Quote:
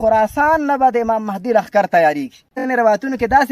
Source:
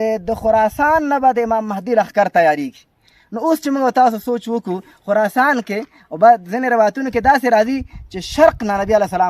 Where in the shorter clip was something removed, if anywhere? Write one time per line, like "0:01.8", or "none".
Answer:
0:02.6